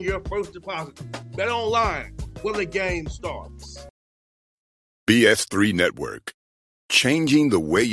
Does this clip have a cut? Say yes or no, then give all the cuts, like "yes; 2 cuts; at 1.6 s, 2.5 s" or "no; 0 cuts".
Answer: yes; 1 cut; at 3.8 s